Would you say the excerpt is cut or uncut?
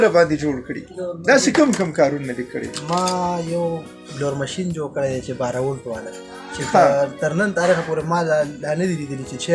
uncut